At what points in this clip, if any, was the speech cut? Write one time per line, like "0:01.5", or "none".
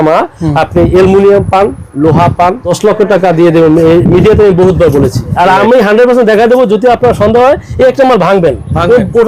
0:02.7
0:05.3